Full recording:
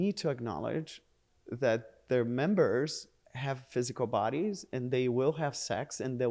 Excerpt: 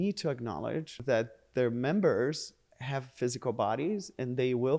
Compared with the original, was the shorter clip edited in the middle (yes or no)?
yes